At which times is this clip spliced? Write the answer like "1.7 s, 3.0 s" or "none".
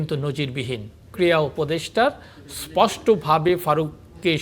1.1 s